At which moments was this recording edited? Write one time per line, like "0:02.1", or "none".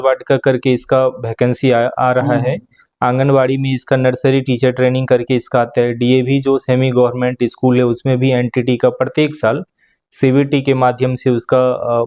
none